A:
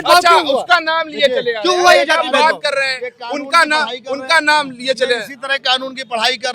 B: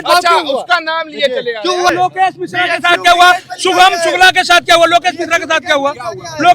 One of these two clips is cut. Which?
B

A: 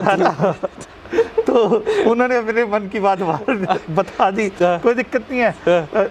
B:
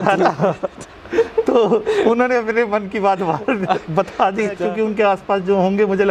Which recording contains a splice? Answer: B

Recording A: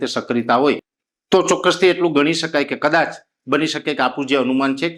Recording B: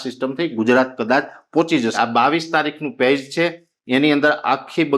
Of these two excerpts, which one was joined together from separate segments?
B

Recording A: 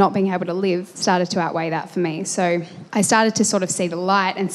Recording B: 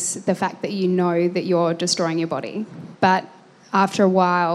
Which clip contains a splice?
A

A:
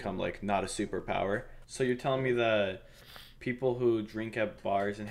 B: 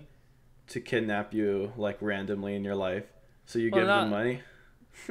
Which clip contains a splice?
A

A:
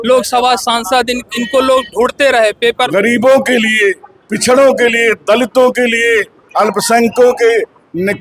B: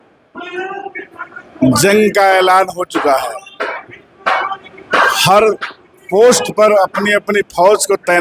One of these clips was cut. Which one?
A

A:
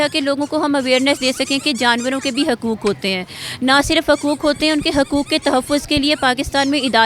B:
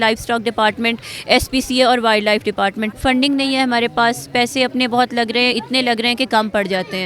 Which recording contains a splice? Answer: B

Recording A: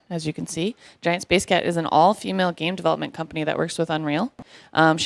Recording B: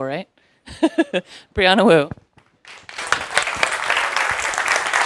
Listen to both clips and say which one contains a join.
A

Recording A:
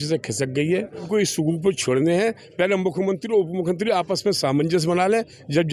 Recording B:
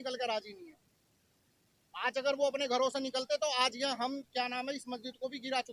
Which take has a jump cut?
A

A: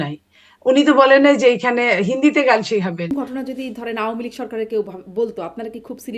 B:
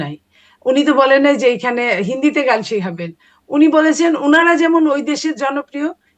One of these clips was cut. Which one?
A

